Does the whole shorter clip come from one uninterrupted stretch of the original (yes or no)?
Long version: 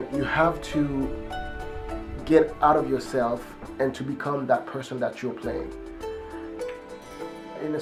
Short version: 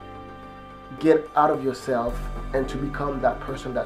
yes